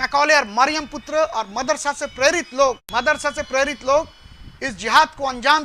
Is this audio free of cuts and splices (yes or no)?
no